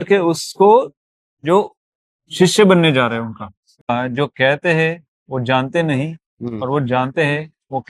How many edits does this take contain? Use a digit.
1